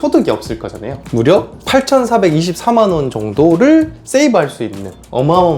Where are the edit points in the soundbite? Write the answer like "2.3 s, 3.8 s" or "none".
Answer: 0.9 s